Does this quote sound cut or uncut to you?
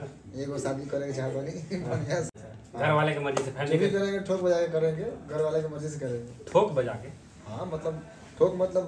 cut